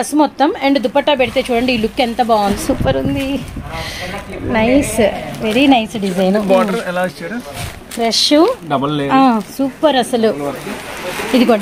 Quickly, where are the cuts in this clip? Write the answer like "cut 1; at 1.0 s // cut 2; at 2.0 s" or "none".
cut 1; at 2.5 s